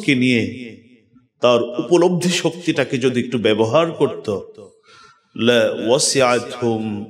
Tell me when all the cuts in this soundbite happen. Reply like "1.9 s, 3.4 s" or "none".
none